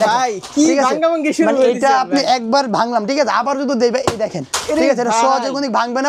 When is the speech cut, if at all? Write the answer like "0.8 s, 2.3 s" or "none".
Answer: none

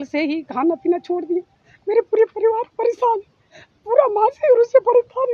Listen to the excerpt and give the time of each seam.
none

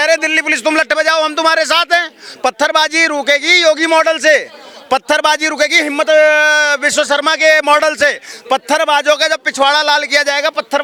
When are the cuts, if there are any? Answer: none

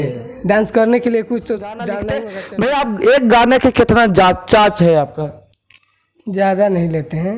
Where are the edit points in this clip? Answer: 2.2 s

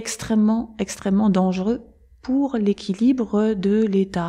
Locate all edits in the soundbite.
none

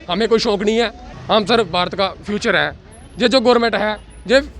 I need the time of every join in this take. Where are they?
1.1 s

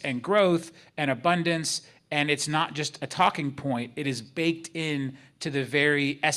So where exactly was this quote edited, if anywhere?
none

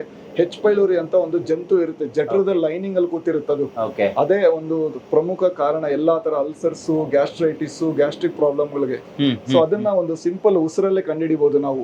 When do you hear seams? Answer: none

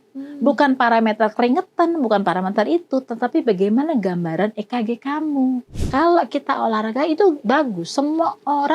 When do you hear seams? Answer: 5.7 s

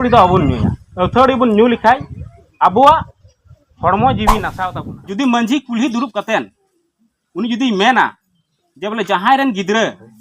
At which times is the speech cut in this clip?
4.6 s

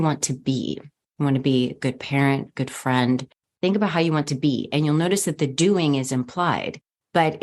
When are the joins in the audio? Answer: 3.4 s

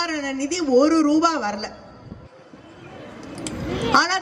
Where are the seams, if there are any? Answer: none

